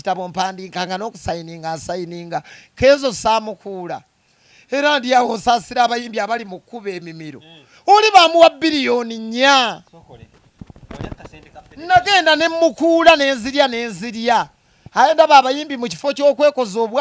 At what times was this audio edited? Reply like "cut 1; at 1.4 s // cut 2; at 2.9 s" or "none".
none